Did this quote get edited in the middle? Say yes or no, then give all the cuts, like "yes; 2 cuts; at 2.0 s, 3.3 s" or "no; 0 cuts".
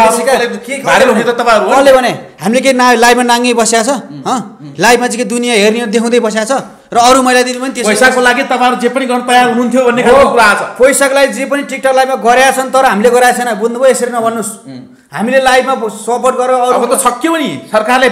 no; 0 cuts